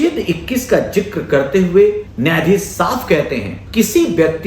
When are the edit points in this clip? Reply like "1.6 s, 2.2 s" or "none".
2.1 s, 3.6 s